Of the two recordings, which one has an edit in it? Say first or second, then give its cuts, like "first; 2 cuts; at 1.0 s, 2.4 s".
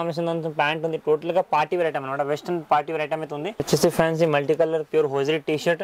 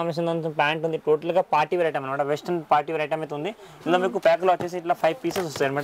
first; 1 cut; at 3.7 s